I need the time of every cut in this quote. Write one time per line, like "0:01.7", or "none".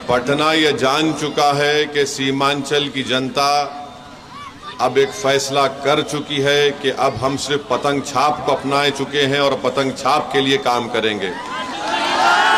none